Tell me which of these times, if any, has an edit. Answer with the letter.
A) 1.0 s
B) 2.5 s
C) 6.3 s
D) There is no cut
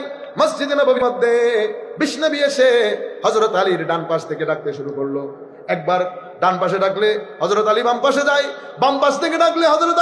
A